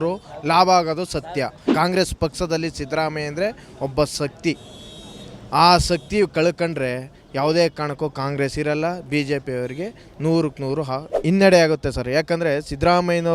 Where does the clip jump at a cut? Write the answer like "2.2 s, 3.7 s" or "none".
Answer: 1.6 s, 11.1 s